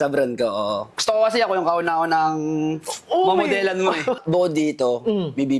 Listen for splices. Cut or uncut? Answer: cut